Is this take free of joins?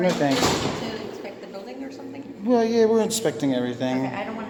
yes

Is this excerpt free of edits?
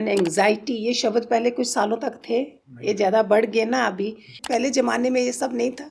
no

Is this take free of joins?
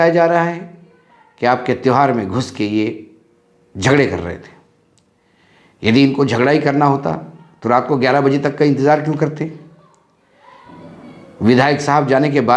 yes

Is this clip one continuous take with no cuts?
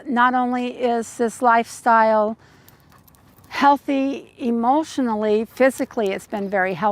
yes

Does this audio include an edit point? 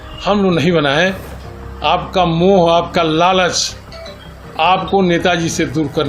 no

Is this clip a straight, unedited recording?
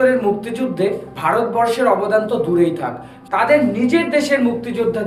yes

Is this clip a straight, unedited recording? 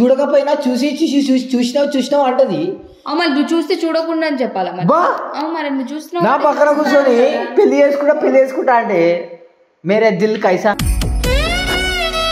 yes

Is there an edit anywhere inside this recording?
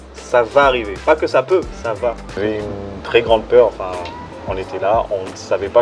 yes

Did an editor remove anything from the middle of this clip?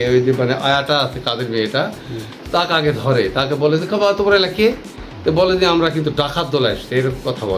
no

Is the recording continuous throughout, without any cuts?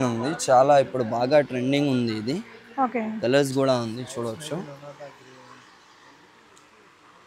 yes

